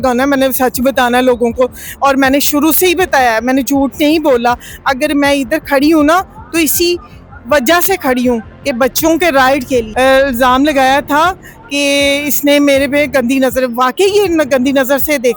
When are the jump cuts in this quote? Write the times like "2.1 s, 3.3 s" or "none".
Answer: none